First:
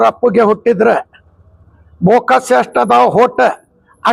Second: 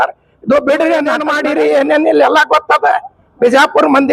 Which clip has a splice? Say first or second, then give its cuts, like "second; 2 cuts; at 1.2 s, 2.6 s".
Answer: second; 1 cut; at 1.3 s